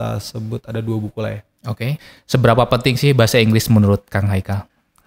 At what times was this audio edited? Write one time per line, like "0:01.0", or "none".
0:02.1